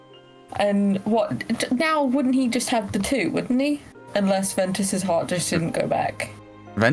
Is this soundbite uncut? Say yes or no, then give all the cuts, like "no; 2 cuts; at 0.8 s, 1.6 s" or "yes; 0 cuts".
no; 1 cut; at 3.9 s